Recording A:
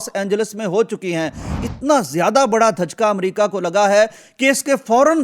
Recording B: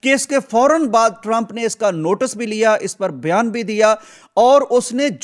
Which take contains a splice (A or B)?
A